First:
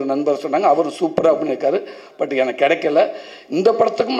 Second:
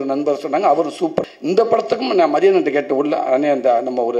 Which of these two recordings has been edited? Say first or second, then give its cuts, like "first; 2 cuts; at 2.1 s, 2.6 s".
second; 1 cut; at 1.2 s